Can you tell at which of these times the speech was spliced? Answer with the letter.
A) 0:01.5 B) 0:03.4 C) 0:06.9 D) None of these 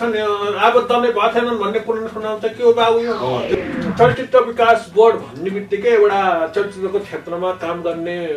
B